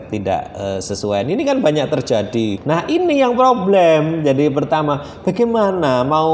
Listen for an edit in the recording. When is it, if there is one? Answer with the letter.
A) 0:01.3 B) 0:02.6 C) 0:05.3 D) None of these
B